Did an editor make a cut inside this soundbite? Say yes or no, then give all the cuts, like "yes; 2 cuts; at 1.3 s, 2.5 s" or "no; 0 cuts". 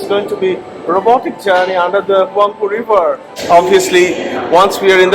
yes; 1 cut; at 3.3 s